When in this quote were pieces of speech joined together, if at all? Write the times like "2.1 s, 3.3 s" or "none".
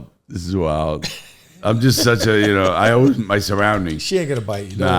none